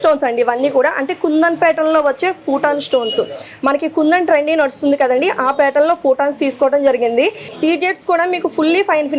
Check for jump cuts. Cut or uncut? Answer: cut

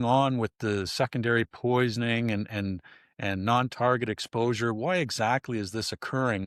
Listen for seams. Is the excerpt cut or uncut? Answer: uncut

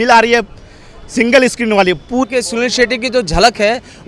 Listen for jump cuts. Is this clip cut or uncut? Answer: cut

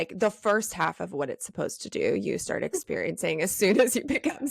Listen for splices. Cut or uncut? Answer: uncut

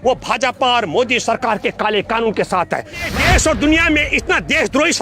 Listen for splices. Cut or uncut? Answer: cut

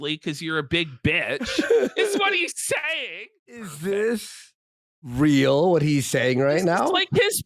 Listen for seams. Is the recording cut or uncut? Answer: cut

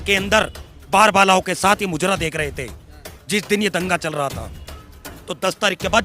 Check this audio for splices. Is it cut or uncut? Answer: cut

